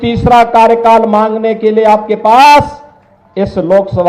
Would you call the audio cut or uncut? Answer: uncut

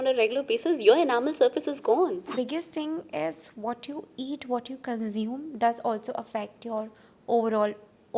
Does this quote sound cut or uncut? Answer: cut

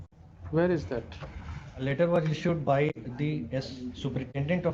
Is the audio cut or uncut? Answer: cut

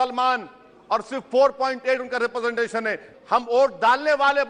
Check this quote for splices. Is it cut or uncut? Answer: cut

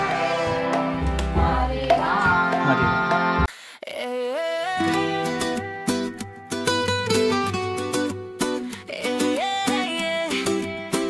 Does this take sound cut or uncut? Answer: cut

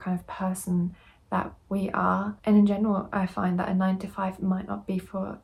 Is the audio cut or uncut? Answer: uncut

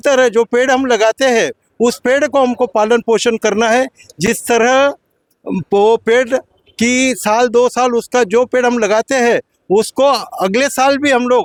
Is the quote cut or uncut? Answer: uncut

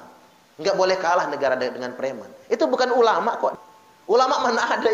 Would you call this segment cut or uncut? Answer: cut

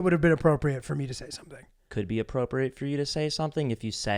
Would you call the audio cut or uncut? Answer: cut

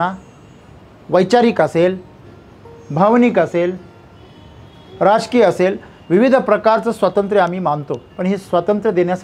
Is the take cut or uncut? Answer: cut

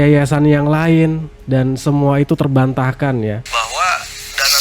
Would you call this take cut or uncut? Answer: cut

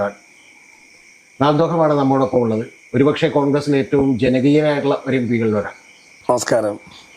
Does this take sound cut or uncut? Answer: cut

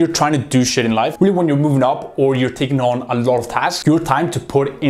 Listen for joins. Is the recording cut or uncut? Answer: cut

